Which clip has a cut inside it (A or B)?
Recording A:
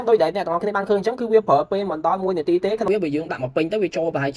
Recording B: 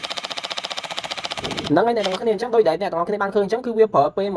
A